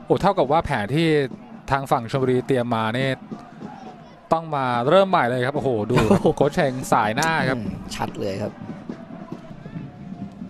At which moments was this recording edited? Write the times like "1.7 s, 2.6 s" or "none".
9.5 s